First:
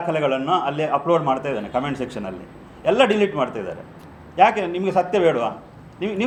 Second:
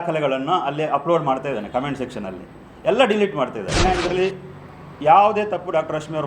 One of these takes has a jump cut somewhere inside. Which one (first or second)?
second